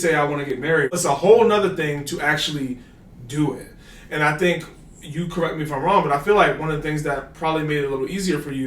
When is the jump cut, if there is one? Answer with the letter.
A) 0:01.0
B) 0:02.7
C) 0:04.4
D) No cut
A